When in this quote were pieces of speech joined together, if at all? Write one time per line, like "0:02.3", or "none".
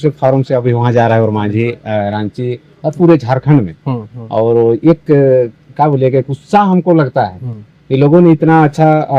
none